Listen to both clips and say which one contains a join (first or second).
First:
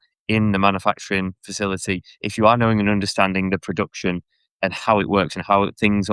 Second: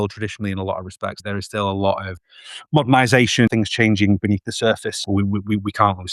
second